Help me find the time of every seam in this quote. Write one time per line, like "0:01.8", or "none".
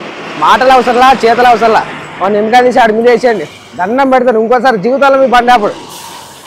none